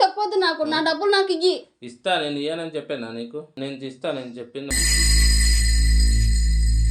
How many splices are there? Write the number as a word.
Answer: zero